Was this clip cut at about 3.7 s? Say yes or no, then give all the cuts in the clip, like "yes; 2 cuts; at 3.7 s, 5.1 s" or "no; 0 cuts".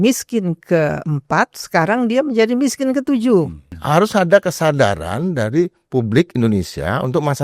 yes; 1 cut; at 3.7 s